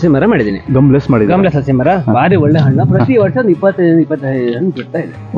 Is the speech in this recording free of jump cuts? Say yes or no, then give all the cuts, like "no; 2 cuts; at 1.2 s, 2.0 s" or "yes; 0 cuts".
yes; 0 cuts